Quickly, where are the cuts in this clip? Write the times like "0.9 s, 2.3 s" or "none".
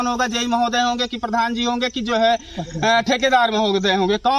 none